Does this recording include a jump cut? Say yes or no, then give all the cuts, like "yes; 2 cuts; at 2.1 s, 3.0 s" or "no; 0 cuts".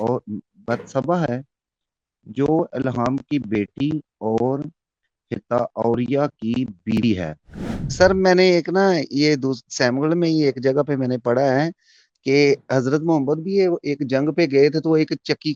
yes; 1 cut; at 7.5 s